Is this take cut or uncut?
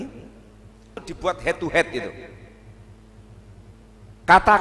cut